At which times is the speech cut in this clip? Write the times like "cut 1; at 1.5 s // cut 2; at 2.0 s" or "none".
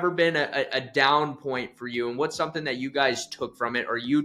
none